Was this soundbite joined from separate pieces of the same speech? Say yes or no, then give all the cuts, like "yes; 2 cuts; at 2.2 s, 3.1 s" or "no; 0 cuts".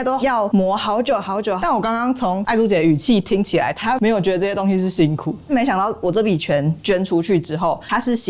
yes; 3 cuts; at 1.6 s, 3.8 s, 5.5 s